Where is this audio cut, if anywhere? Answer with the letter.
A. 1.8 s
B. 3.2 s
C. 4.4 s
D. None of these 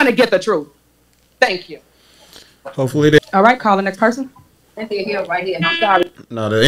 B